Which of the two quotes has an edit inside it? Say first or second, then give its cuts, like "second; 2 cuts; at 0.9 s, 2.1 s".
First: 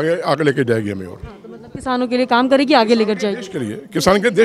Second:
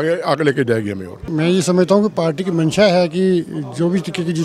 second; 1 cut; at 1.2 s